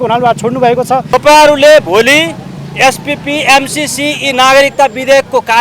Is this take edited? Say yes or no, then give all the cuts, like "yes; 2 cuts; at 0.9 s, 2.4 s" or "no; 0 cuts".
yes; 1 cut; at 1.1 s